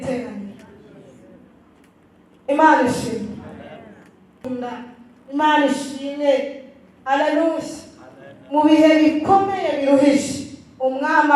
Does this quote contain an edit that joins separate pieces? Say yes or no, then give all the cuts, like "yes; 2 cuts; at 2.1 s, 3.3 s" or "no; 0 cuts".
yes; 1 cut; at 4.4 s